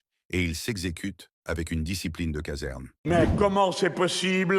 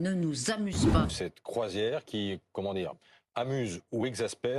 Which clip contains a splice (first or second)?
first